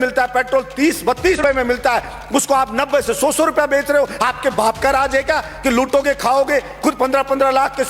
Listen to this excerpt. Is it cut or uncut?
cut